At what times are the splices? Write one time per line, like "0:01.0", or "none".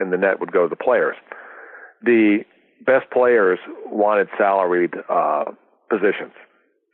none